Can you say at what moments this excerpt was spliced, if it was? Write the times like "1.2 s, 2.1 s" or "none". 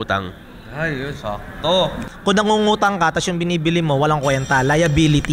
2.1 s

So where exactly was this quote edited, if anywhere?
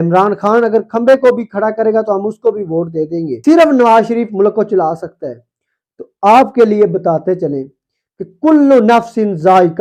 3.3 s

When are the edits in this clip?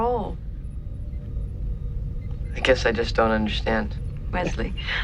1.1 s

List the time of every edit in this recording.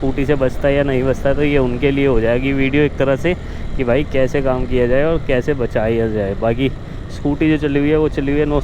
none

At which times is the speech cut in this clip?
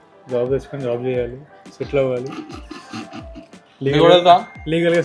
none

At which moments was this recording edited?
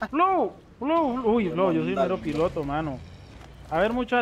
none

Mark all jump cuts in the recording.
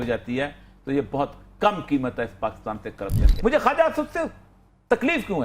3.2 s

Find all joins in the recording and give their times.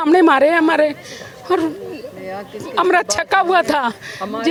none

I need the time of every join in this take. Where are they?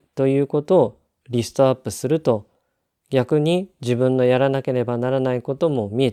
none

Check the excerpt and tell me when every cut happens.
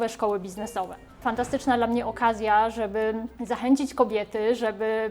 1.2 s, 3.3 s

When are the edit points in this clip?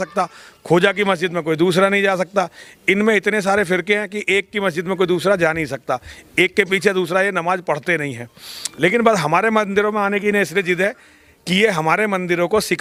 none

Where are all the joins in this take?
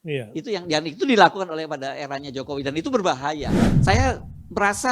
3.6 s

